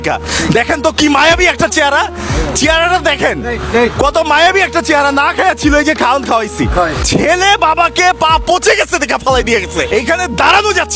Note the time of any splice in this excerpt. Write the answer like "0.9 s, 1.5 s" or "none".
7.0 s, 9.9 s